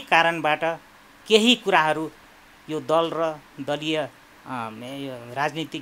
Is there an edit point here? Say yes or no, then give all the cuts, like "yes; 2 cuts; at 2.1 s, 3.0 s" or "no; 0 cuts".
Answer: no; 0 cuts